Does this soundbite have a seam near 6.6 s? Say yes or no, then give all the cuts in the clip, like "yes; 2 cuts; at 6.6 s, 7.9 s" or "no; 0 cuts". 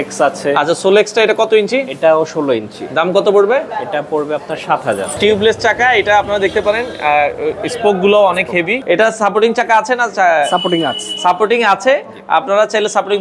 no; 2 cuts; at 5.2 s, 8.8 s